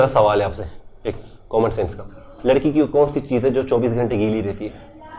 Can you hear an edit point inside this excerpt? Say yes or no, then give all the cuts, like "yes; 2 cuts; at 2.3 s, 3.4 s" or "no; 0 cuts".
no; 0 cuts